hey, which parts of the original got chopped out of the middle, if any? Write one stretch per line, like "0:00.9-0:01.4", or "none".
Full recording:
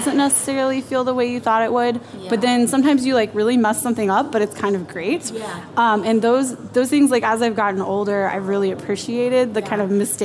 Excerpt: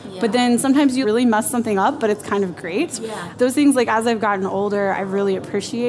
0:03.1-0:03.3
0:05.6-0:06.6